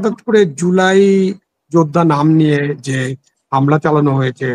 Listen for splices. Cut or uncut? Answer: uncut